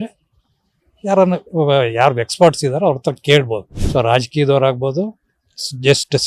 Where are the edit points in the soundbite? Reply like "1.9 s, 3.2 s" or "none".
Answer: 3.7 s